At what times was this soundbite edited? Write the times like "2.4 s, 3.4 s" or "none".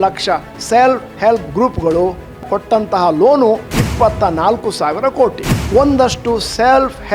2.4 s, 3.7 s, 5.5 s